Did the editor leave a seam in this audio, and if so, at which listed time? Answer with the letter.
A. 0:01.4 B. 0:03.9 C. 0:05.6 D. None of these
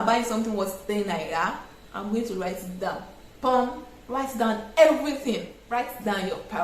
C